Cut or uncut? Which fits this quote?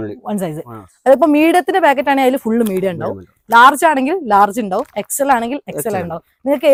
uncut